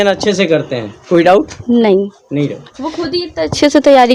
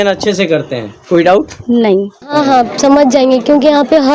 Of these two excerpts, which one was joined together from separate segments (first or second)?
second